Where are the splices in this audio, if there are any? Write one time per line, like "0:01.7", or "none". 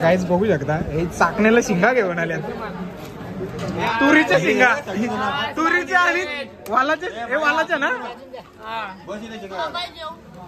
none